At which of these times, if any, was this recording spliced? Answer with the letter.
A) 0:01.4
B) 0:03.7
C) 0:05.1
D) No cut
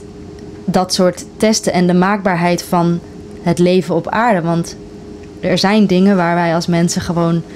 D